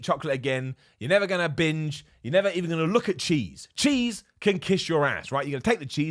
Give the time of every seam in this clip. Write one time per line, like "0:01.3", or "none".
none